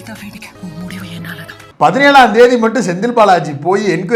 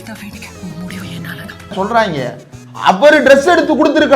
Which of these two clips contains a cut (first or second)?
second